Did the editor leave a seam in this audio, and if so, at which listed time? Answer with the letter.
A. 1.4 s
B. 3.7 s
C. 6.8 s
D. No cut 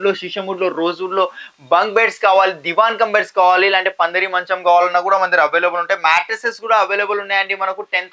D